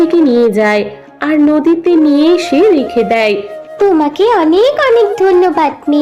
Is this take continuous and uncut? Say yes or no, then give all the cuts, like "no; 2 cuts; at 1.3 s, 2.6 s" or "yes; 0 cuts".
yes; 0 cuts